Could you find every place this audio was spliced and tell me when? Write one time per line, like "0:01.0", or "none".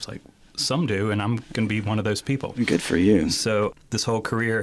none